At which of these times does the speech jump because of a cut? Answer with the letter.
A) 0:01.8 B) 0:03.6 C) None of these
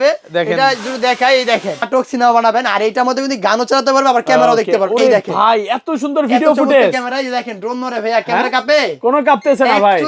A